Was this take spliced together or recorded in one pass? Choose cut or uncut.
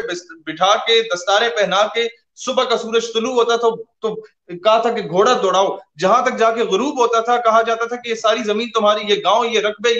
uncut